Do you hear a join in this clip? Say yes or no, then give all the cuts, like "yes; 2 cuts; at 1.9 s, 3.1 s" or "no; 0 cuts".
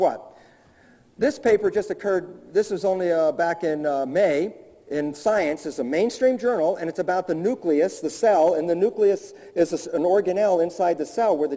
no; 0 cuts